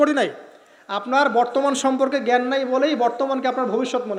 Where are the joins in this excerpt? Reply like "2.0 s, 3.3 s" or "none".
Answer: none